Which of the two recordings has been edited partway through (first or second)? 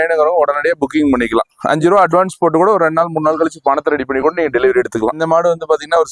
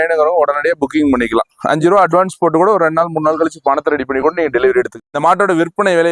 second